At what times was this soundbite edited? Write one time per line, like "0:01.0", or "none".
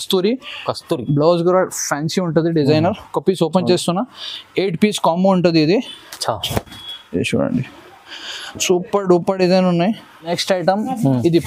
0:10.2